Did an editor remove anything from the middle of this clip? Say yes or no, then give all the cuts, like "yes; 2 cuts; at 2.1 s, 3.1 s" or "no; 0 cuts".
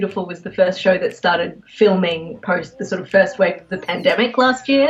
no; 0 cuts